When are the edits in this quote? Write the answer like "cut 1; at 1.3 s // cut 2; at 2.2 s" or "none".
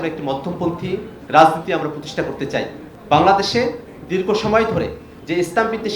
cut 1; at 1.2 s // cut 2; at 2.9 s // cut 3; at 5.1 s